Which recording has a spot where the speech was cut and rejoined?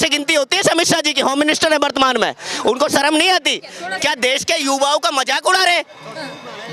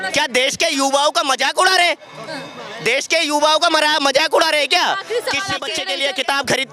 second; 1 cut; at 5.8 s

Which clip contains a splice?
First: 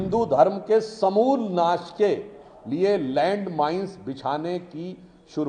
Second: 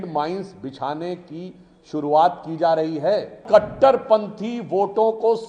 second; 1 cut; at 3.4 s

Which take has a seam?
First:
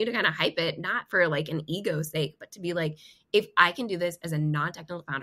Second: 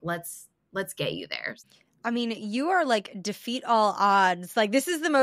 second; 1 cut; at 1.5 s

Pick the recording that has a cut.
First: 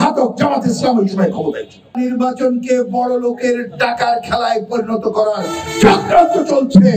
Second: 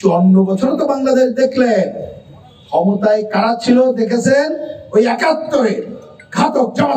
first; 1 cut; at 2.0 s

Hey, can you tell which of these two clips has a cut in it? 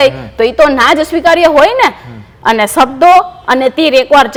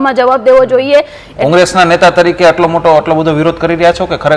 second; 1 cut; at 1.2 s

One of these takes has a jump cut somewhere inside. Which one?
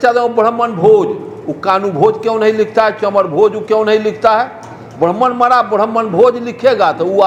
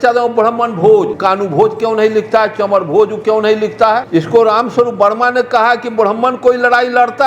second; 2 cuts; at 1.1 s, 4.1 s

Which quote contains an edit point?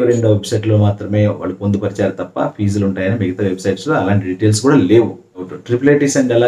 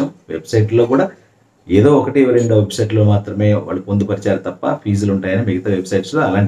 first; 1 cut; at 5.5 s

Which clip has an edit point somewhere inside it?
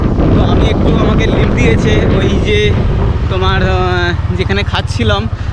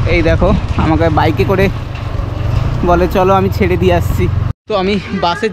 second; 1 cut; at 4.5 s

